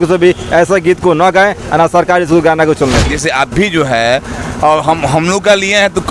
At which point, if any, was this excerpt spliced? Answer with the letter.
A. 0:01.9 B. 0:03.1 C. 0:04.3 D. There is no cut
B